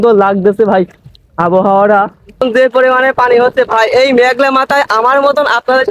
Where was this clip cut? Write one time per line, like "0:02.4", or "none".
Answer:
0:02.4

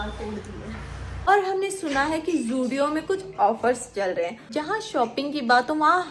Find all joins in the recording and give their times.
0:01.1
0:04.6

